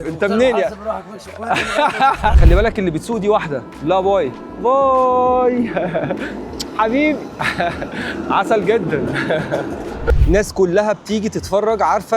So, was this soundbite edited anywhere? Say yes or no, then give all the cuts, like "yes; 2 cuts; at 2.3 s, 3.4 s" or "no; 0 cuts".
yes; 2 cuts; at 2.4 s, 10.1 s